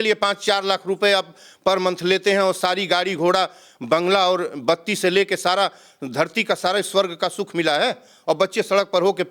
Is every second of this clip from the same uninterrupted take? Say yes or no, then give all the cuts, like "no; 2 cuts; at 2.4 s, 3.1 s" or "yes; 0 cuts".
yes; 0 cuts